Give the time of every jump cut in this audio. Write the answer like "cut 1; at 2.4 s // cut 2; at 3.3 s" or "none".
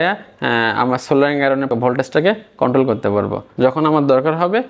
cut 1; at 1.7 s // cut 2; at 3.5 s